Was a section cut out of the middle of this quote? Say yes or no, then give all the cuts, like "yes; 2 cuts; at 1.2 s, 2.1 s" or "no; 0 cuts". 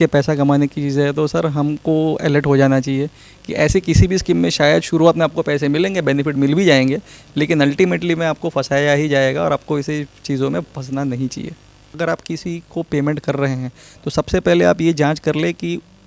yes; 1 cut; at 11.9 s